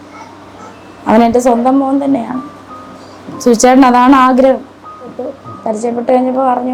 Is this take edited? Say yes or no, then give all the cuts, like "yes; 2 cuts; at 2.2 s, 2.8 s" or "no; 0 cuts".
yes; 1 cut; at 5.5 s